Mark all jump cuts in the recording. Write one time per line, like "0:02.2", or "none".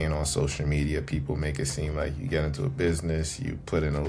none